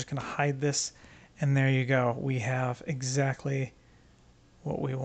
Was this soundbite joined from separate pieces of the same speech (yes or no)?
no